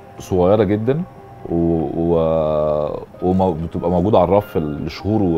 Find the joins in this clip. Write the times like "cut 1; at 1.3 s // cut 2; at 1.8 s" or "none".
none